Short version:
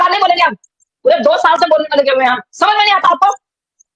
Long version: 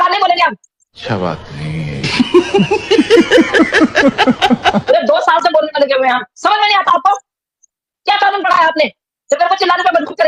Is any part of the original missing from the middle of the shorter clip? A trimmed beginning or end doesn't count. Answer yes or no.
yes